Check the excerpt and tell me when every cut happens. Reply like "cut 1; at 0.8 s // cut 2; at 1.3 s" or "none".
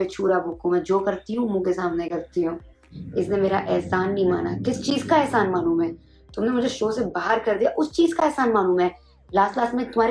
cut 1; at 2.9 s